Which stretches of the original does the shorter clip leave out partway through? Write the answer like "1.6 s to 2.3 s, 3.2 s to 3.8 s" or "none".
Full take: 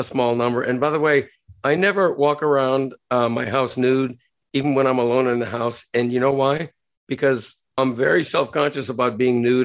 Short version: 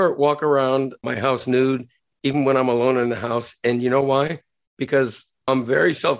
3.0 s to 3.3 s